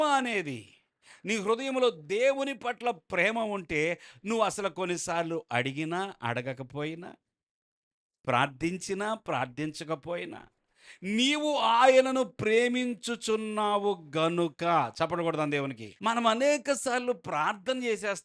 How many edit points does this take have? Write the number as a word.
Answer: one